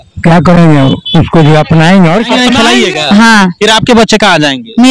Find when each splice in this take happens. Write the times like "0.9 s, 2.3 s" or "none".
2.4 s